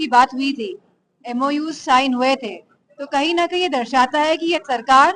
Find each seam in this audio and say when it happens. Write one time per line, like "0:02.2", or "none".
none